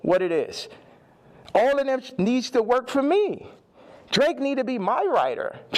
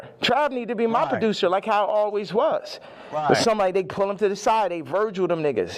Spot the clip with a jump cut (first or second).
first